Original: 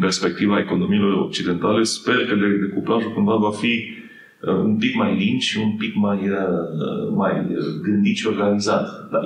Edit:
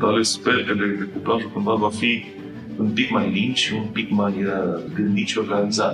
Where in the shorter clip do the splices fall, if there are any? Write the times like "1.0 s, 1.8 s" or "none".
2.8 s, 4.9 s